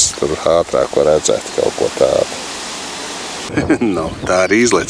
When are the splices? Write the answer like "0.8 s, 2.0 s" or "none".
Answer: 3.4 s